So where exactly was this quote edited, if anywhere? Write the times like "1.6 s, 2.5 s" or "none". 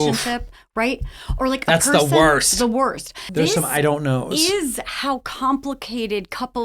3.2 s